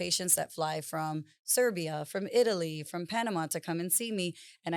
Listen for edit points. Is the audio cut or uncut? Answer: uncut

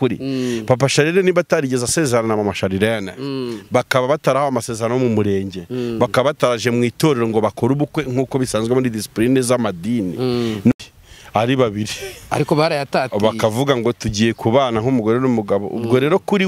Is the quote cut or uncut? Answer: cut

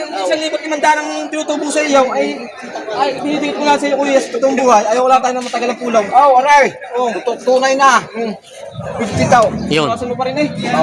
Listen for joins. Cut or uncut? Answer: uncut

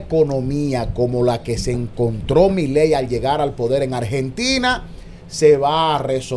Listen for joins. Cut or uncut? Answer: uncut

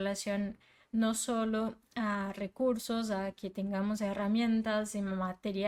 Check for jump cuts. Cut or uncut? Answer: uncut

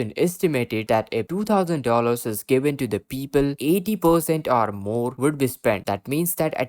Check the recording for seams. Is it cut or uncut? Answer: cut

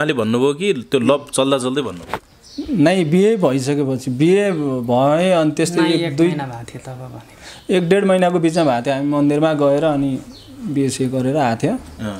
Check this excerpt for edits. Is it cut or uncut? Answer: uncut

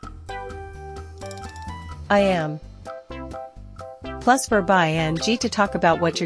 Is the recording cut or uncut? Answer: uncut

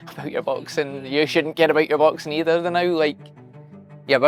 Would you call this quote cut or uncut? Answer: uncut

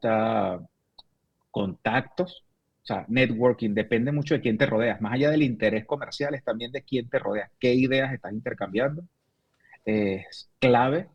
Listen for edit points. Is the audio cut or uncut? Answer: uncut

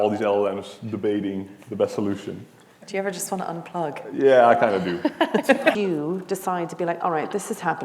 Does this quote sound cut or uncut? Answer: cut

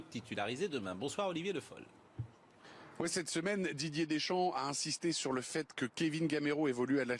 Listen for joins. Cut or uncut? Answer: cut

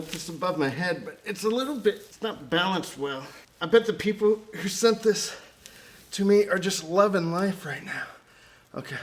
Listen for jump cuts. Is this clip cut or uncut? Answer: cut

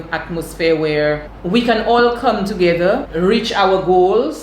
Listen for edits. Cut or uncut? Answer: cut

